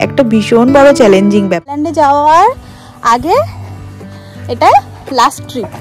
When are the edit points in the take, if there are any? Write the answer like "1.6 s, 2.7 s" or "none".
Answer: 1.7 s